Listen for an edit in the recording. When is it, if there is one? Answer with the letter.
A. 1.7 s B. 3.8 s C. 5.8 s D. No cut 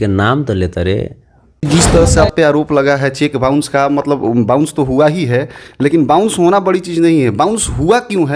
A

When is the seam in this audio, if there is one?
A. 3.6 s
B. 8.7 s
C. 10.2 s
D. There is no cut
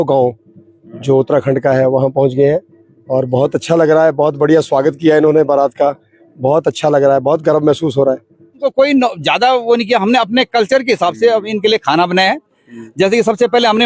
B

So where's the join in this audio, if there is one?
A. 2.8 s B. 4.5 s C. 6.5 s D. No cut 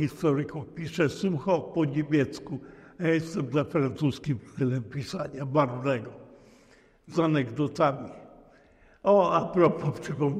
D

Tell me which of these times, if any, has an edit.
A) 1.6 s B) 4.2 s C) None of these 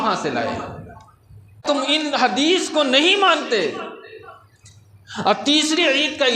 A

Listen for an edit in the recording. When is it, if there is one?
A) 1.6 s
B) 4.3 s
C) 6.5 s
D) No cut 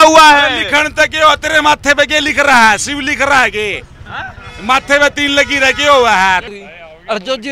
C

